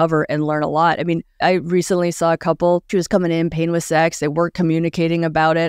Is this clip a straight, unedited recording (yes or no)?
no